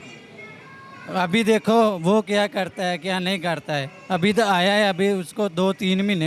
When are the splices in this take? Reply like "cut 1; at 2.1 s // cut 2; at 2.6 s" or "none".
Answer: none